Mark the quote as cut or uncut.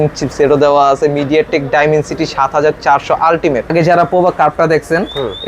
cut